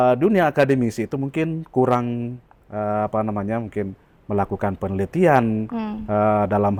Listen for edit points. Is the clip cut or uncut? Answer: uncut